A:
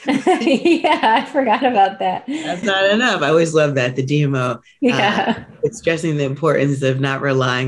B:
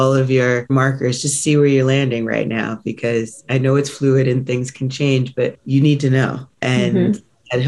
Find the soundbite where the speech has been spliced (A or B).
B